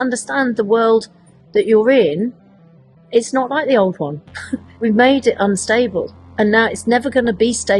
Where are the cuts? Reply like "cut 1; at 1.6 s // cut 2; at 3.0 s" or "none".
cut 1; at 4.7 s